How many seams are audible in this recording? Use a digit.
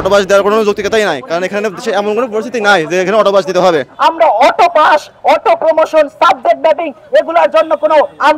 1